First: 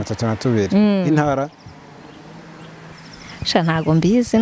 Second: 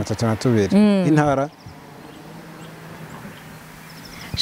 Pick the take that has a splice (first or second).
first